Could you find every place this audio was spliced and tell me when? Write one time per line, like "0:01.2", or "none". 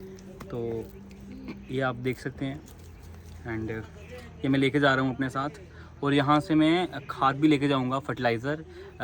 none